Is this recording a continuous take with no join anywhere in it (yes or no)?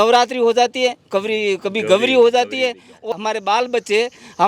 no